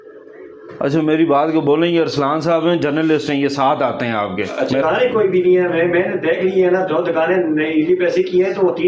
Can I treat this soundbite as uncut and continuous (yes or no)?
no